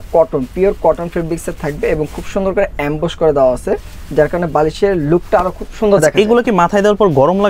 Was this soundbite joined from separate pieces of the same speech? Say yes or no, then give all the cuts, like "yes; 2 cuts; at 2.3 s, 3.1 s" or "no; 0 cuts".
no; 0 cuts